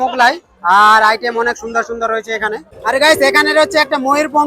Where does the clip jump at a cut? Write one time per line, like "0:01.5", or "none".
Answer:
0:02.7